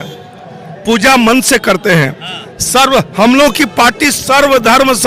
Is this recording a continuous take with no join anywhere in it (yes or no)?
yes